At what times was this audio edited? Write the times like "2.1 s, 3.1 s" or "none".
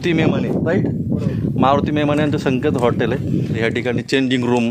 3.5 s